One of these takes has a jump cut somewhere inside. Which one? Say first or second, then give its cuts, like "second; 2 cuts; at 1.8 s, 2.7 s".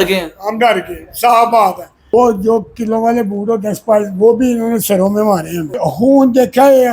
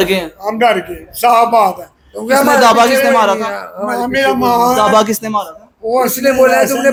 first; 2 cuts; at 2.0 s, 5.7 s